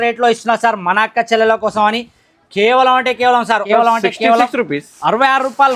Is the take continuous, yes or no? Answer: no